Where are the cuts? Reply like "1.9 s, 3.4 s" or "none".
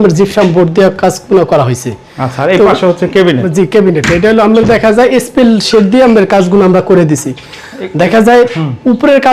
none